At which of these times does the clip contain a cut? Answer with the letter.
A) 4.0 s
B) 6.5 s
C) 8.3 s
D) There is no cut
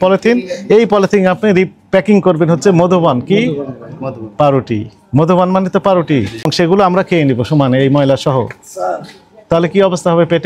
B